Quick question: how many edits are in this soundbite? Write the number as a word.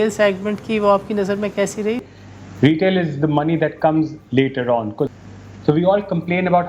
two